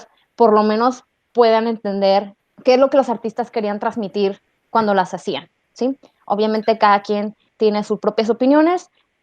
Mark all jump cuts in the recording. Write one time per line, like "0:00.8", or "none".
0:02.4